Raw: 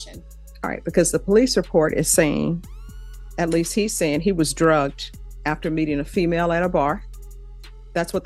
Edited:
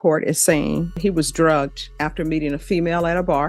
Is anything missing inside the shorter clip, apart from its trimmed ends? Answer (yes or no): yes